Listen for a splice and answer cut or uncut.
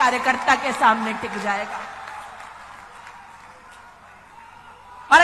uncut